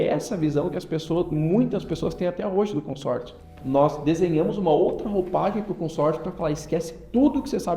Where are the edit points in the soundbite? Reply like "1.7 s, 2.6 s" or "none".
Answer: 3.5 s